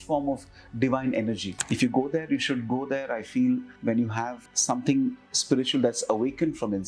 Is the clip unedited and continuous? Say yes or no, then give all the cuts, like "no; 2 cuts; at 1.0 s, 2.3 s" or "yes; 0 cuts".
no; 3 cuts; at 1.5 s, 3.7 s, 4.5 s